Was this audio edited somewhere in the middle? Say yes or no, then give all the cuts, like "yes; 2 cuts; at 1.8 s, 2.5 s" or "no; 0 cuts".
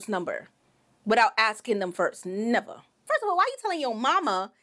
yes; 1 cut; at 3.0 s